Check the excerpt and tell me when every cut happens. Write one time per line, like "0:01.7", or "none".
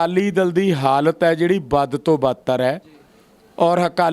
none